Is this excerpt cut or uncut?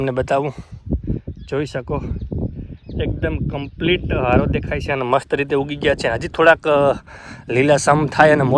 uncut